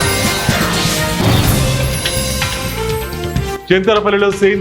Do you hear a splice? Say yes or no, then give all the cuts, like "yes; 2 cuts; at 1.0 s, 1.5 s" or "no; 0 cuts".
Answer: no; 0 cuts